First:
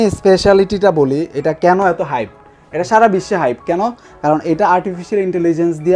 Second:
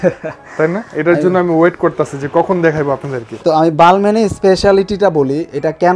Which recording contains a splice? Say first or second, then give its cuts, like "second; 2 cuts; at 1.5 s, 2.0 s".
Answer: second; 1 cut; at 3.3 s